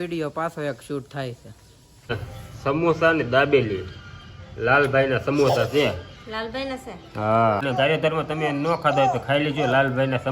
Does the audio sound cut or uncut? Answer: cut